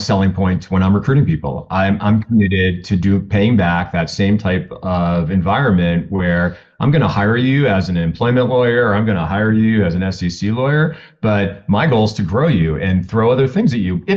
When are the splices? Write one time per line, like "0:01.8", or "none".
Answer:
none